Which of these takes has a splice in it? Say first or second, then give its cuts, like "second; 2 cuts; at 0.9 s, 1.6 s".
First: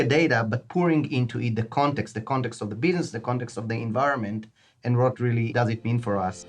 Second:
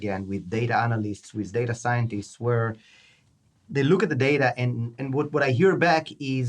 first; 1 cut; at 5.5 s